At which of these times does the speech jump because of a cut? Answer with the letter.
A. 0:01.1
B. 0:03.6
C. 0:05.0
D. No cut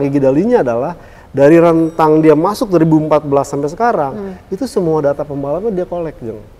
D